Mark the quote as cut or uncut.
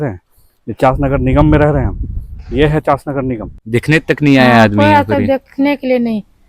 cut